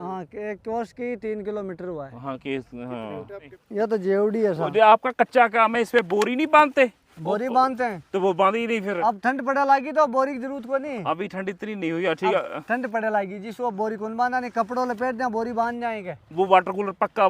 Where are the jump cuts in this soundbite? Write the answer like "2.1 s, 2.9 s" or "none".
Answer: 3.6 s